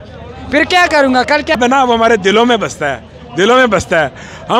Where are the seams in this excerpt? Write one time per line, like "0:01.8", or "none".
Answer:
0:01.6